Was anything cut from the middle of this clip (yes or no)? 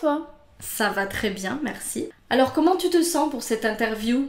yes